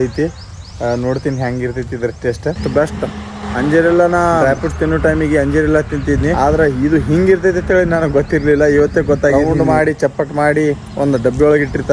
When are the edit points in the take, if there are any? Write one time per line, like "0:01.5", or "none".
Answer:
0:02.6
0:03.4
0:04.4
0:06.3
0:09.3